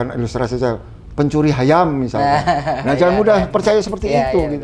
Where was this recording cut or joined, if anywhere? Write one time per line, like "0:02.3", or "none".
none